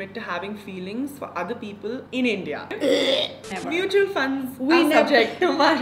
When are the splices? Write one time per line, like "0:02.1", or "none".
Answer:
0:02.0
0:03.5